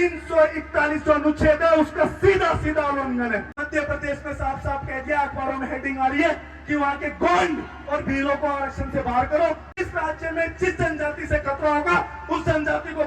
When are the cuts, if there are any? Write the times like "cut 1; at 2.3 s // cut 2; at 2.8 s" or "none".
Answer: cut 1; at 3.6 s // cut 2; at 9.8 s

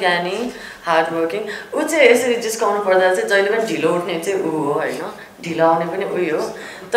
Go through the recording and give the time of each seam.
none

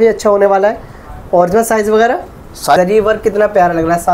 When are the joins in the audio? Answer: cut 1; at 2.8 s

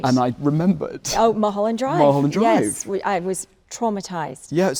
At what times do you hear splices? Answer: none

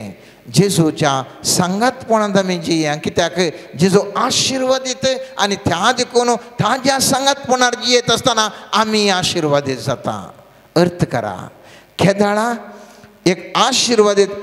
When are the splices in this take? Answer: none

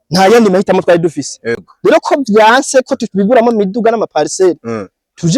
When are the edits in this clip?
cut 1; at 1.7 s

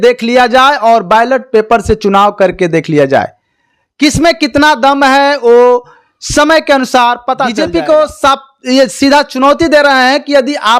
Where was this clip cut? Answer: cut 1; at 7.5 s

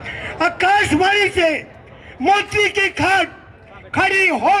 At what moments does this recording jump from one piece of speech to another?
none

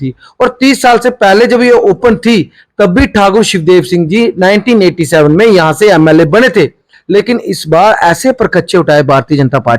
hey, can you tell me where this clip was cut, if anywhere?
cut 1; at 6.9 s

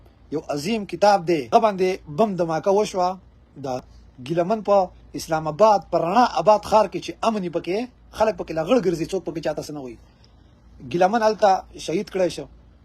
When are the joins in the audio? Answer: cut 1; at 1.5 s // cut 2; at 3.8 s

